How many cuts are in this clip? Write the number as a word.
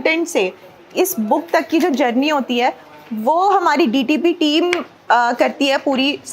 zero